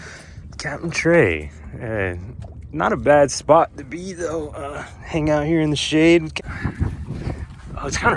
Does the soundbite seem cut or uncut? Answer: cut